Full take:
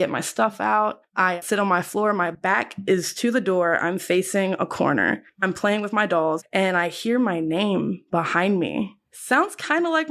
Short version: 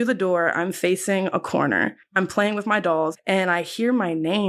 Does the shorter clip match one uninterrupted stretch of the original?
yes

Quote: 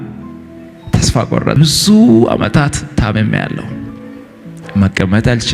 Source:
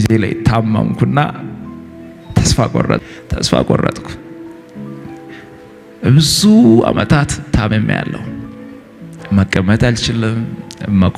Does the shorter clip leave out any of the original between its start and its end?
yes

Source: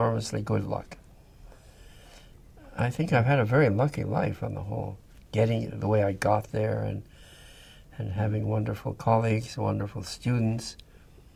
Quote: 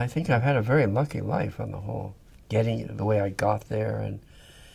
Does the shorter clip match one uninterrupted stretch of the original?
yes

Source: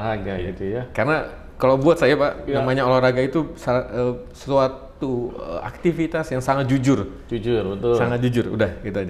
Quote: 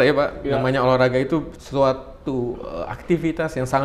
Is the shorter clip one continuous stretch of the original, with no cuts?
no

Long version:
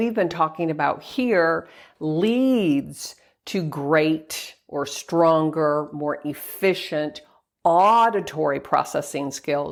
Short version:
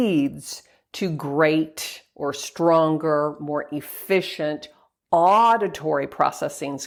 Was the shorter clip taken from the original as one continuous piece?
yes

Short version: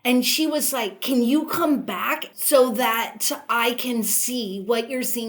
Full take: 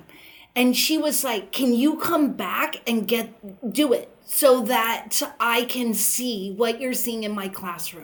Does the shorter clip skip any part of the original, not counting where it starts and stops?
yes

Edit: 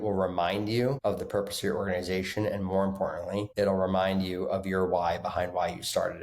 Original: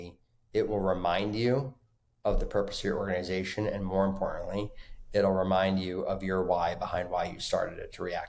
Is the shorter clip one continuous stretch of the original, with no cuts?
no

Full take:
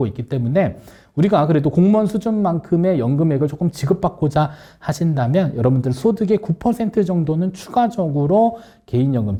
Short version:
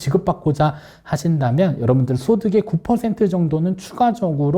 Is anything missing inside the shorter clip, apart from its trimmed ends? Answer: no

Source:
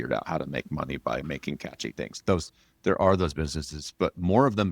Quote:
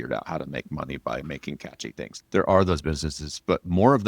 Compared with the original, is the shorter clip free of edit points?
no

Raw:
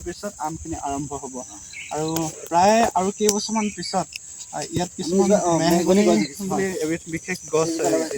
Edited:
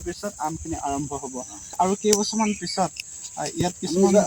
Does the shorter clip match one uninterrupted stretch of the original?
no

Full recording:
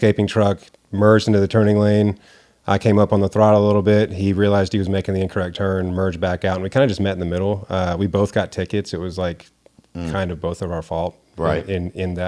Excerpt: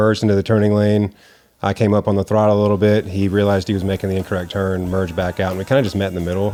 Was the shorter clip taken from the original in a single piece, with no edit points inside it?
yes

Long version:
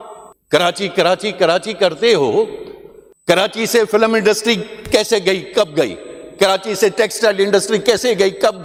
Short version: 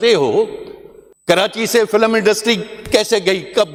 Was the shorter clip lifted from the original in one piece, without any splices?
yes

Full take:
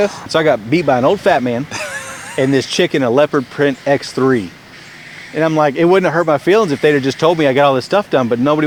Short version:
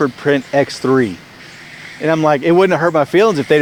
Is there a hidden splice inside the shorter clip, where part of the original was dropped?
no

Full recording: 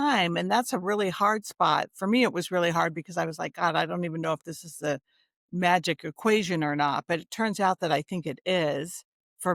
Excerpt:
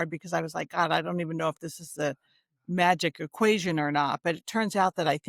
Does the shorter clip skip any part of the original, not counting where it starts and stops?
no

